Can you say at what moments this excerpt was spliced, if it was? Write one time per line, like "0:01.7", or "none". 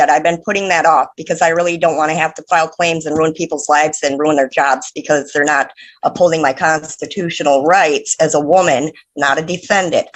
none